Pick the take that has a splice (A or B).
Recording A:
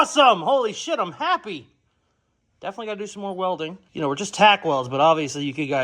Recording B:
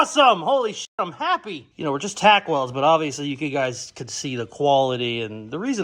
B